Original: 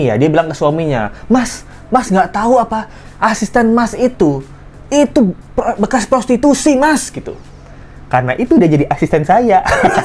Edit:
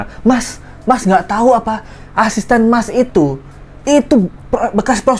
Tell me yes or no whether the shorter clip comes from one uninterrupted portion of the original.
yes